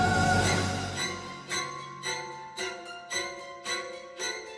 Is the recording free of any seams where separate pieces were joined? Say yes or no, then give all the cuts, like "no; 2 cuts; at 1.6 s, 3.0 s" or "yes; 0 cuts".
yes; 0 cuts